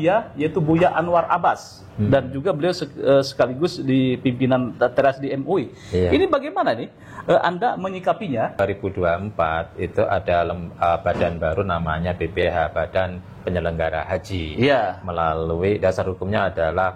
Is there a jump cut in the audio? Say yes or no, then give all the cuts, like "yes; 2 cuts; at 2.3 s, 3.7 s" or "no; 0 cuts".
no; 0 cuts